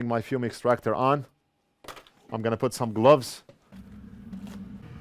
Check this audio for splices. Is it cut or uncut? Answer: cut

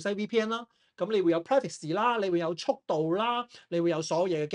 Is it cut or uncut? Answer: uncut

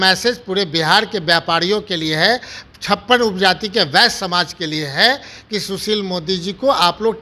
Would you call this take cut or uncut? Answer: uncut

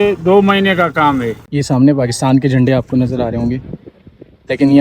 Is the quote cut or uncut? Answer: cut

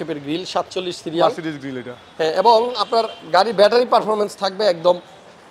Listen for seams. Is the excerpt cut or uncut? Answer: uncut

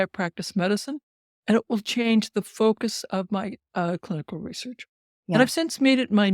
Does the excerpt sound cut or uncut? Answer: uncut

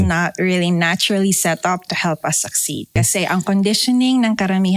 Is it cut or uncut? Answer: cut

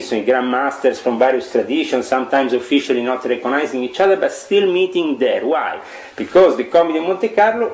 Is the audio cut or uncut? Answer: uncut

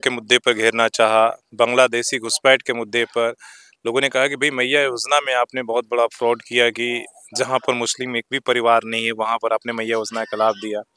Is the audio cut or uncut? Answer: uncut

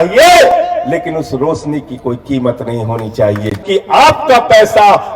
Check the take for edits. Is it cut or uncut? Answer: cut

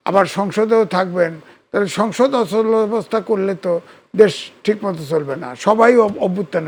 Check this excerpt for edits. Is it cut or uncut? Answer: uncut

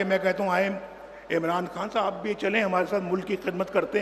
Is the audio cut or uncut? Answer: uncut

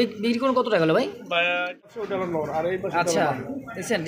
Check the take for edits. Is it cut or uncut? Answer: cut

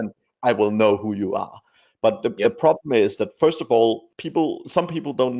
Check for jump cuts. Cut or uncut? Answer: cut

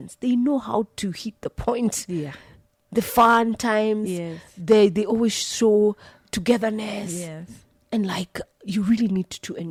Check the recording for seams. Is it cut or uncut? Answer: uncut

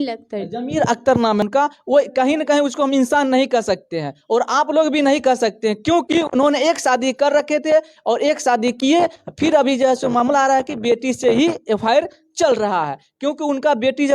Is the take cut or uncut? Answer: cut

